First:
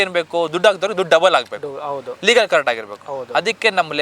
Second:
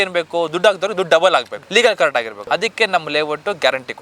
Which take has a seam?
second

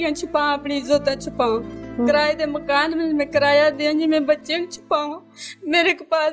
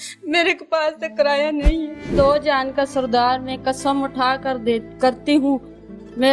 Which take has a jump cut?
second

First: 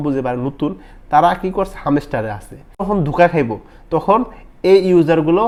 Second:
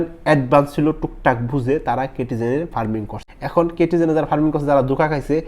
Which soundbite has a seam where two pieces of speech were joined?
second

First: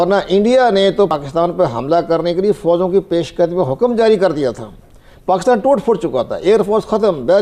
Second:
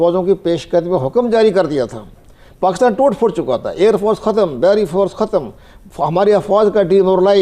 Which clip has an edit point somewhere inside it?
first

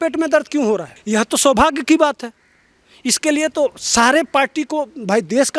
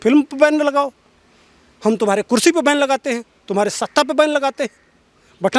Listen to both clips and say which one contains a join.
first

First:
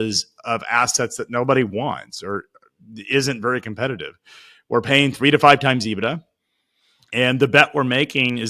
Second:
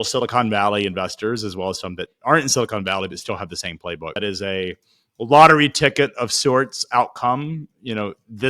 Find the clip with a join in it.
second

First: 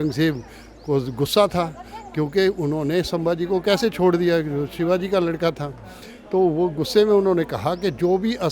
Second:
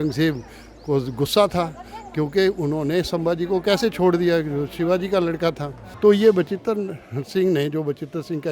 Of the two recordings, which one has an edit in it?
second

